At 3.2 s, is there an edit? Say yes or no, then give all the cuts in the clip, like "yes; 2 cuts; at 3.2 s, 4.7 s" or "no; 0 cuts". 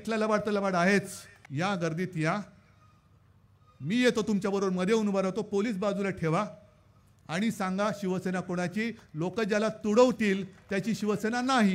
no; 1 cut; at 1.4 s